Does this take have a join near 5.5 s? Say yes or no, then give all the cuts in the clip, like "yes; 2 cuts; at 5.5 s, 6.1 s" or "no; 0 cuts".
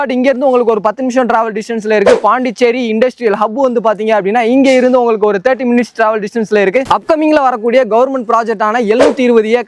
no; 1 cut; at 6.9 s